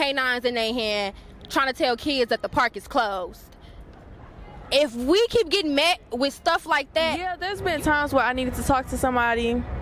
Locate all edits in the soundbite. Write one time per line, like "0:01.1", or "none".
0:07.4